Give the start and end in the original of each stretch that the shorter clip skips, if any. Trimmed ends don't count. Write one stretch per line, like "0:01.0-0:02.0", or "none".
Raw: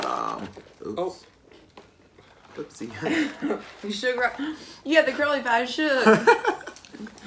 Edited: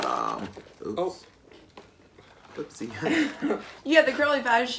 0:03.7-0:04.7

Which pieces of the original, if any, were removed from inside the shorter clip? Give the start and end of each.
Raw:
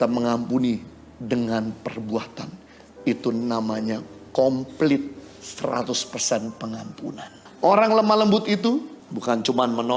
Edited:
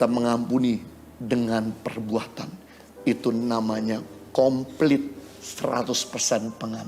none

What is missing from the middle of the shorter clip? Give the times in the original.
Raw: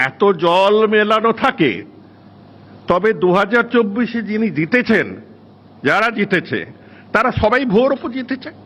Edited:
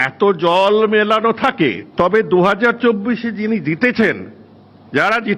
0:01.8-0:02.7

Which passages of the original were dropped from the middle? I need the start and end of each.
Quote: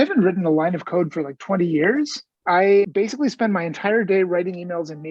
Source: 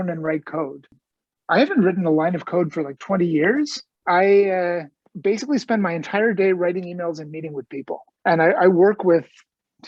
0:04.5-0:05.2

